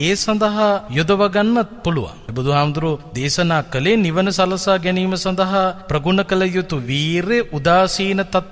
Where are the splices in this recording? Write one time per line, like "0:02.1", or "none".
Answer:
0:00.9
0:02.2
0:03.1
0:05.8